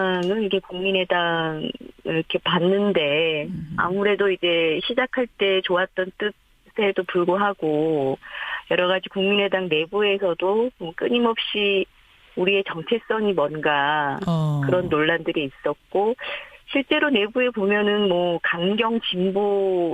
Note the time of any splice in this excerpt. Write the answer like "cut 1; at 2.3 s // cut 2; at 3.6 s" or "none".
none

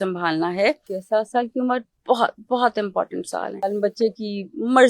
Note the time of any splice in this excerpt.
cut 1; at 0.9 s // cut 2; at 3.7 s

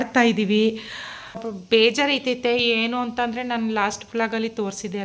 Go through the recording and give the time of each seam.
cut 1; at 1.4 s

